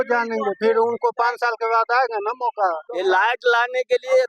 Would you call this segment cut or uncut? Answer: cut